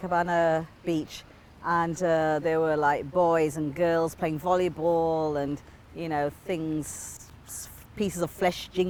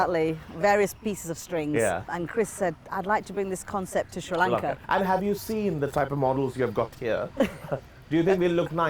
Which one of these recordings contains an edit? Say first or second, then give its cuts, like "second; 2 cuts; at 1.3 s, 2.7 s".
second; 2 cuts; at 2.1 s, 4.8 s